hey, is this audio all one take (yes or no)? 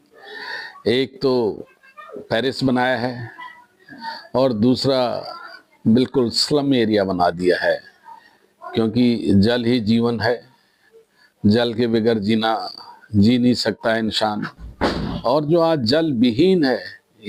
yes